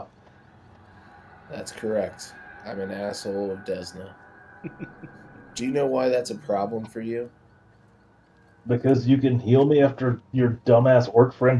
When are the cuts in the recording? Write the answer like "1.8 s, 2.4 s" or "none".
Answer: none

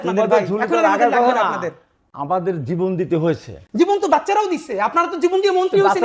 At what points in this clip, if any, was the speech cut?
none

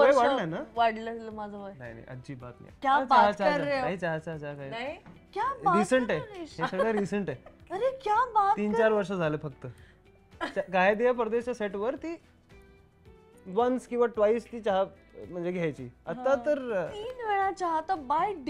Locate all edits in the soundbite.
2.7 s

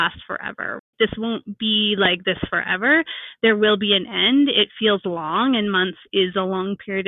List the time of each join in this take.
none

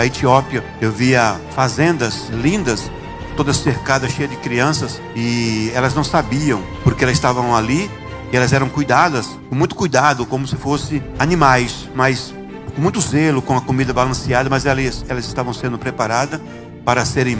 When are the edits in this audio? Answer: none

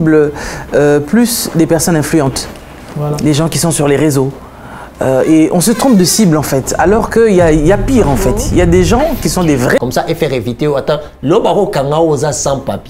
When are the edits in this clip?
9.8 s

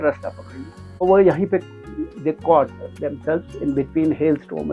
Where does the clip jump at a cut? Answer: 1.0 s

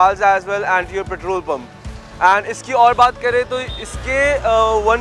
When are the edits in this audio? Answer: none

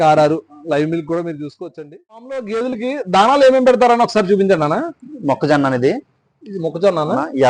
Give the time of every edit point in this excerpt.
2.4 s

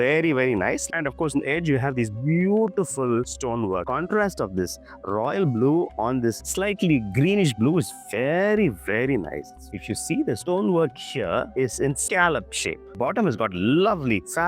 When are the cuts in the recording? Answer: 0.8 s, 3.8 s, 9.8 s, 12.9 s

